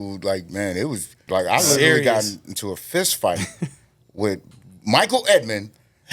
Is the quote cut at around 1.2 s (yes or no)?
yes